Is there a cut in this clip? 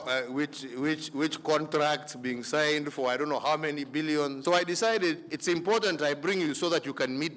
yes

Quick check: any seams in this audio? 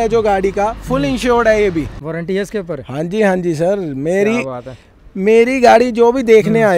yes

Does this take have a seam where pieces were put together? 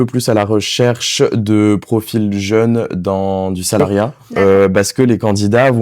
yes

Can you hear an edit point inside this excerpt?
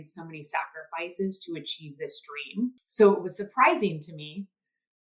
yes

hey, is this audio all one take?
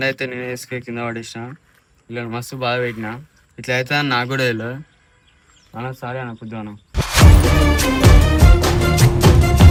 yes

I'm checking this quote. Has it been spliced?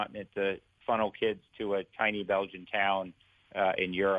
no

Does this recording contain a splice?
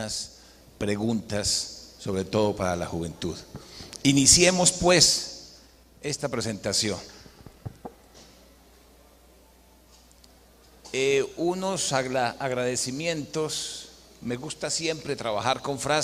no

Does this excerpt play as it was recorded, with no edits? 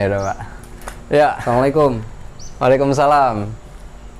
yes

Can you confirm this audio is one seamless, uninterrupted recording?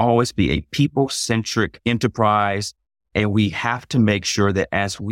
no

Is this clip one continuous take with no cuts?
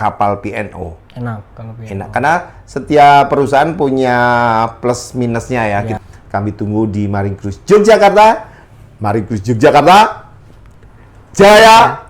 no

